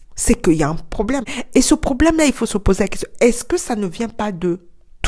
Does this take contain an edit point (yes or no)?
yes